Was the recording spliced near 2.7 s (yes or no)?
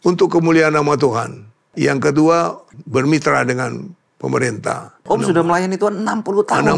yes